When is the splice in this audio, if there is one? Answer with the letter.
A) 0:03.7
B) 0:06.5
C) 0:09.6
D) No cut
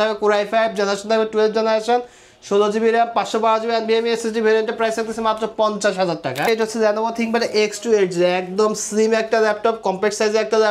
B